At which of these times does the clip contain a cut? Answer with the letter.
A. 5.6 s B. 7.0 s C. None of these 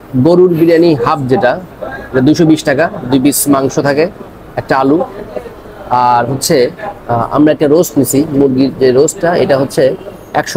C